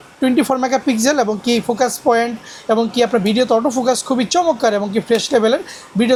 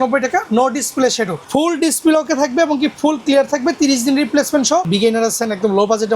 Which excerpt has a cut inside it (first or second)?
second